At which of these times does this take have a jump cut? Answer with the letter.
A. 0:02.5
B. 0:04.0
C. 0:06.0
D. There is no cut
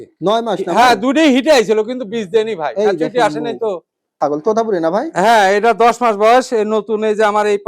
B